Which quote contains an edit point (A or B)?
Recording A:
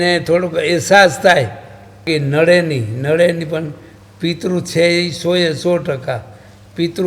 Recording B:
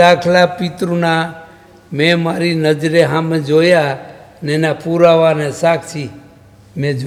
A